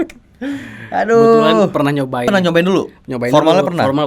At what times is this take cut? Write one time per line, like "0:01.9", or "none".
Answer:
0:02.3